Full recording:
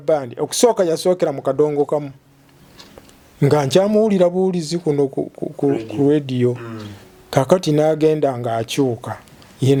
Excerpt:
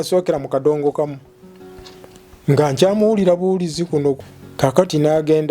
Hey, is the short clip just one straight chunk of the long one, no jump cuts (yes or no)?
no